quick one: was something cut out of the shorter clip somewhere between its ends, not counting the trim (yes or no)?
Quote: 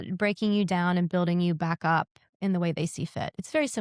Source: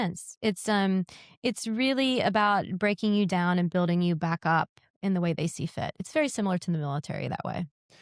no